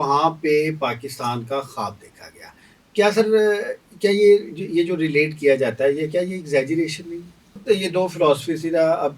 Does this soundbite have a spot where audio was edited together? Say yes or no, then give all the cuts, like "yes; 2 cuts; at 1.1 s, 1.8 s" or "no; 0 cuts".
yes; 1 cut; at 7.6 s